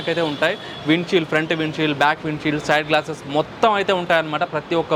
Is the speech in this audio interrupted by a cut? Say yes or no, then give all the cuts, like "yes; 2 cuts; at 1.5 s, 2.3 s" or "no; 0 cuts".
no; 0 cuts